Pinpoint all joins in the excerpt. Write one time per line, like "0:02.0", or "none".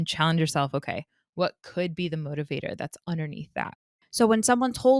0:03.7